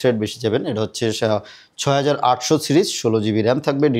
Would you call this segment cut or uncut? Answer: uncut